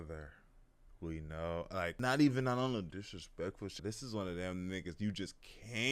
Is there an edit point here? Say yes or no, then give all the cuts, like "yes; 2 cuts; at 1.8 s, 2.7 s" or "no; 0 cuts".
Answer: yes; 2 cuts; at 2.0 s, 3.8 s